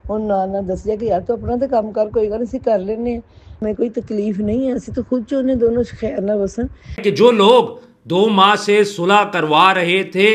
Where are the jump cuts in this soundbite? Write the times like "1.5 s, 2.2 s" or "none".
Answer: 7.0 s